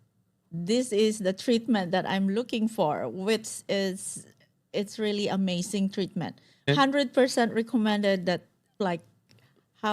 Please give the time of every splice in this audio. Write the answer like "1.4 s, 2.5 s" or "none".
6.7 s, 8.7 s

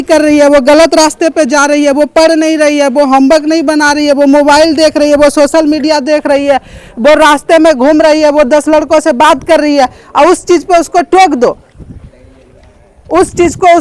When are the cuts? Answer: none

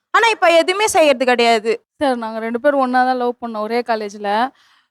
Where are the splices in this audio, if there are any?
1.8 s

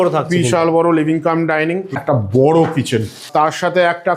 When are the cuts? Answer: 2.0 s, 3.3 s

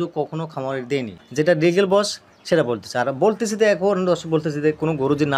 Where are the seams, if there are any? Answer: 1.2 s

